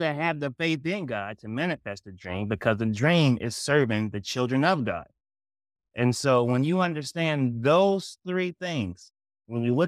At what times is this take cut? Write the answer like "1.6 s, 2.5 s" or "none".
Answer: none